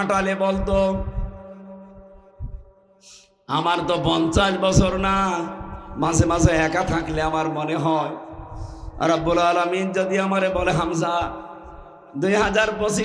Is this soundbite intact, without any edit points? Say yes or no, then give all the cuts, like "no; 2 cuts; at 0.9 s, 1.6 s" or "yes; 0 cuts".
yes; 0 cuts